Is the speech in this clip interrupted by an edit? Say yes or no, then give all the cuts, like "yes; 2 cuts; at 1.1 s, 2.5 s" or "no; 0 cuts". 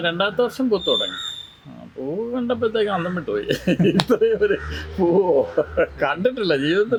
no; 0 cuts